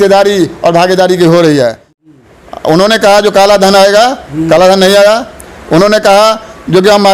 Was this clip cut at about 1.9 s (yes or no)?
yes